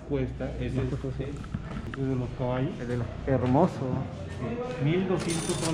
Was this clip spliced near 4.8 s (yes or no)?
no